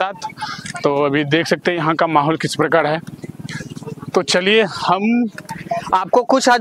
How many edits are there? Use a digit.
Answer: 0